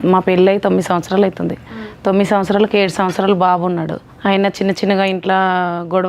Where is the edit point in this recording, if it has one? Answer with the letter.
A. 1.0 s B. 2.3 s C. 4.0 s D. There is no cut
C